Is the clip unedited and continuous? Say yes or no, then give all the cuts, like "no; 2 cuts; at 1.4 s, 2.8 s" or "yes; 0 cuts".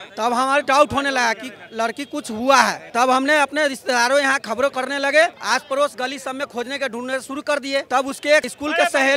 yes; 0 cuts